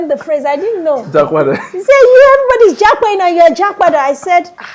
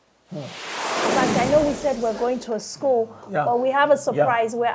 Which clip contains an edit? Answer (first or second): second